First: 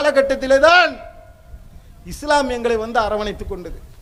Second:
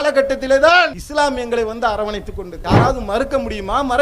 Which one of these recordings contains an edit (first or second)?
second